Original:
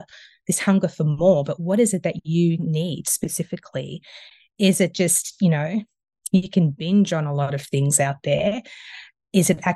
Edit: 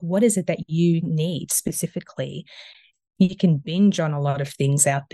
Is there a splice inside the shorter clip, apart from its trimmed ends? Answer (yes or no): yes